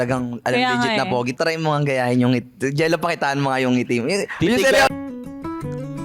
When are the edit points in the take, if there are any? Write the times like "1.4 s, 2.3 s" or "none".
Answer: 1.3 s, 5.1 s